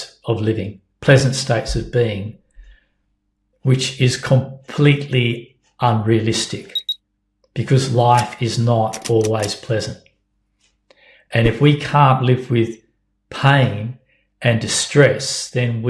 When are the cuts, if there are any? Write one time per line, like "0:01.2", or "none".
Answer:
none

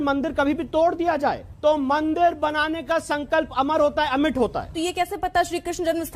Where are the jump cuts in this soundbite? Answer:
0:01.5
0:04.7

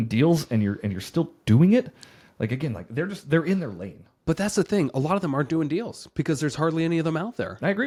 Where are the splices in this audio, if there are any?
none

